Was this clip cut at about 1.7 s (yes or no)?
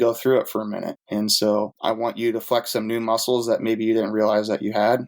yes